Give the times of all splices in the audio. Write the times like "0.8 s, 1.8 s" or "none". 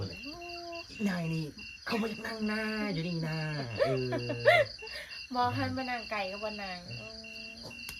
none